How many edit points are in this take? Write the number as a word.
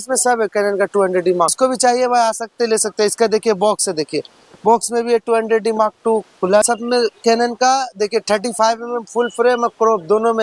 two